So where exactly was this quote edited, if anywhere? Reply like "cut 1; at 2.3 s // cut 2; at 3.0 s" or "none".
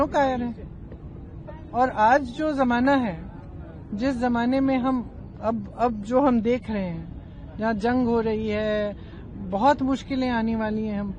none